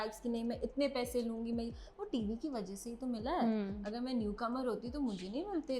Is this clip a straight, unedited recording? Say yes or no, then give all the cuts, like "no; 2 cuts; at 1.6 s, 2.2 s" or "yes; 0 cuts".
yes; 0 cuts